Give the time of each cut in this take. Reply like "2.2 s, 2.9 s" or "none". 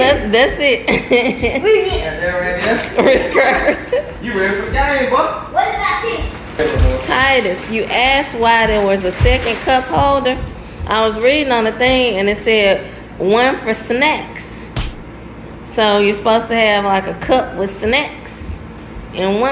6.6 s